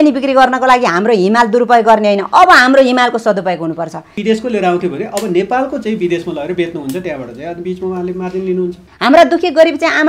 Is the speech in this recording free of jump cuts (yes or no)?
no